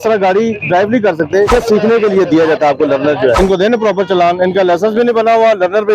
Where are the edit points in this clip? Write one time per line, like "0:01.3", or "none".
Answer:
0:01.5
0:03.4